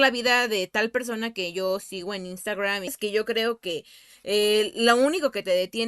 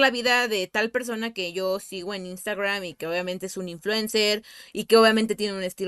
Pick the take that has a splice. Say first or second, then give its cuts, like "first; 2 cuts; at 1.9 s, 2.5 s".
first; 1 cut; at 3.0 s